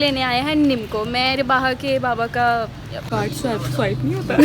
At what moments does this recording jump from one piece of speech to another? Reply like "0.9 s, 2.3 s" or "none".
3.0 s